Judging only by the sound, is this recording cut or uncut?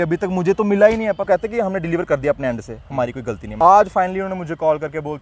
cut